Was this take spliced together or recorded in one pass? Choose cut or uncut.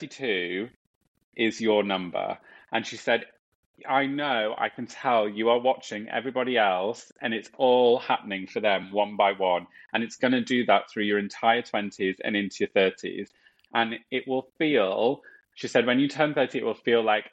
uncut